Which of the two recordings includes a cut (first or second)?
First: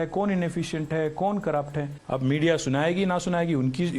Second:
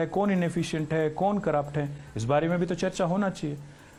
first